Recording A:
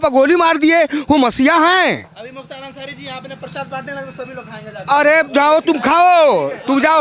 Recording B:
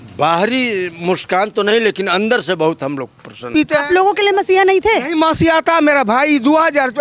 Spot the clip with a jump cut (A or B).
B